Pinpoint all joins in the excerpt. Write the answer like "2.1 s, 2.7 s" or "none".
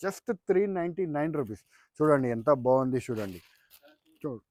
none